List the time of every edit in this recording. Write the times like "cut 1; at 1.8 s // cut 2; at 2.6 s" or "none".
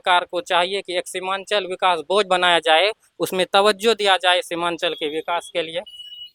none